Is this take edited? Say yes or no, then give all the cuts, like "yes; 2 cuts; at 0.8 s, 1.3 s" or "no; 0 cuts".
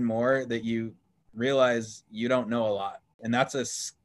yes; 1 cut; at 3.1 s